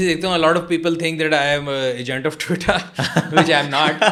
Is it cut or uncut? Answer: uncut